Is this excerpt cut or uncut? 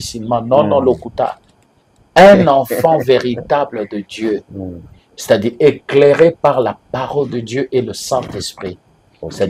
uncut